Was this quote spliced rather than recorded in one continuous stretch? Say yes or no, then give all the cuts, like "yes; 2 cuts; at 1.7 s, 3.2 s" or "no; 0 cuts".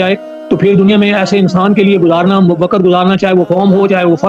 no; 0 cuts